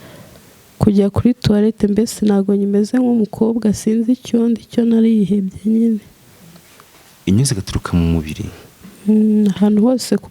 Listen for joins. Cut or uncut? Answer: cut